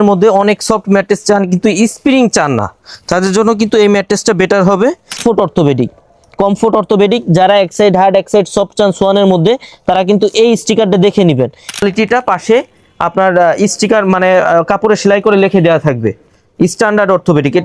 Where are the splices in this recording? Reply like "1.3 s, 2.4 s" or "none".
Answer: 5.2 s, 11.8 s